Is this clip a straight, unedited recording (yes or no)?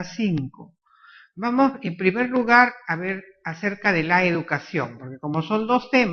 no